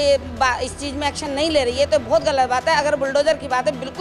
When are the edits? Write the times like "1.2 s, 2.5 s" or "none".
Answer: none